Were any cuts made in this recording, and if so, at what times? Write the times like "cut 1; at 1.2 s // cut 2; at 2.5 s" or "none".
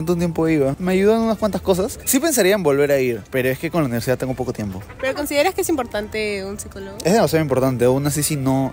none

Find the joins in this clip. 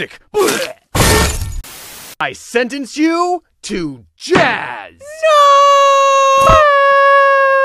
cut 1; at 1.5 s

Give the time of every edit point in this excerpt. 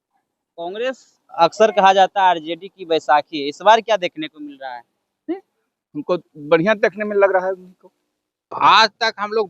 cut 1; at 8.6 s

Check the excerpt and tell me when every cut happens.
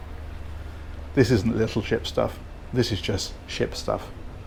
none

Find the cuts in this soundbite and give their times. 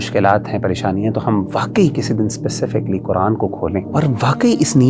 cut 1; at 3.9 s

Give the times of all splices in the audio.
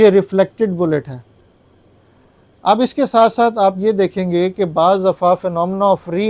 none

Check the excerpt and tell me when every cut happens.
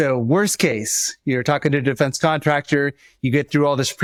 none

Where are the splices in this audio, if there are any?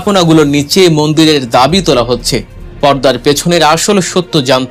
none

